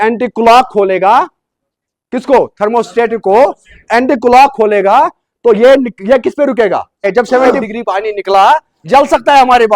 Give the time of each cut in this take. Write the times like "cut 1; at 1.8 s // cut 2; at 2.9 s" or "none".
cut 1; at 7.5 s // cut 2; at 8.7 s